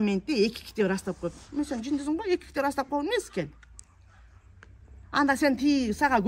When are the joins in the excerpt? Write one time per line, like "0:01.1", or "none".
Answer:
none